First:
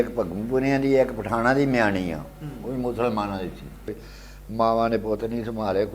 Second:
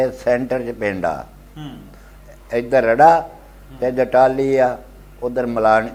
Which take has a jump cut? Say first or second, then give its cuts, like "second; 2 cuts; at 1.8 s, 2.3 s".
first; 1 cut; at 3.9 s